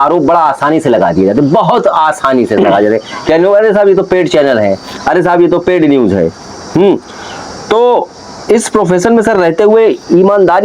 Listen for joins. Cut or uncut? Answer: uncut